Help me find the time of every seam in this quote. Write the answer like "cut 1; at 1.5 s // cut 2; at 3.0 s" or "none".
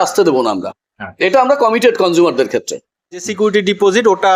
cut 1; at 3.3 s